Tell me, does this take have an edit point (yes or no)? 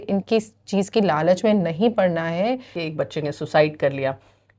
yes